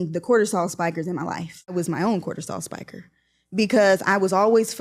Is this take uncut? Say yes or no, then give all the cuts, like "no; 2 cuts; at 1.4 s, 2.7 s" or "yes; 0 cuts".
no; 1 cut; at 1.7 s